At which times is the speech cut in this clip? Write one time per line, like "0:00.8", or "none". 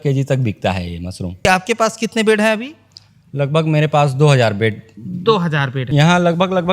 0:01.5
0:05.8

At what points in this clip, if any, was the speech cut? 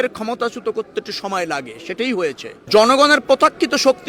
0:02.5

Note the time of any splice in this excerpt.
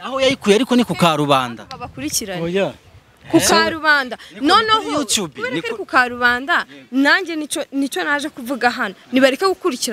none

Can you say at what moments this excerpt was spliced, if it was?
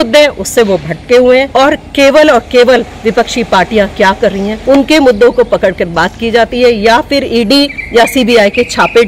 0:01.5
0:04.6
0:07.8

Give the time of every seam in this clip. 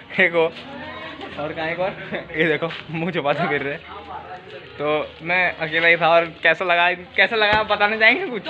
none

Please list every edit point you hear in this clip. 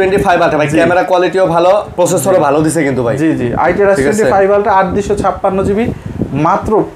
none

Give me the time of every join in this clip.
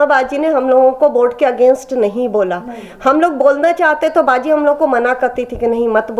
none

